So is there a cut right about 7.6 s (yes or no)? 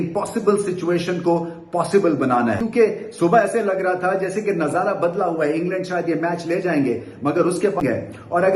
yes